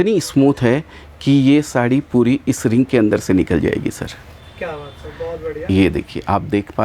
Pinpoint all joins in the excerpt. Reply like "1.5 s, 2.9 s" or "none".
none